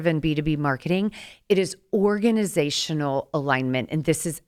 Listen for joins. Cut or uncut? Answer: uncut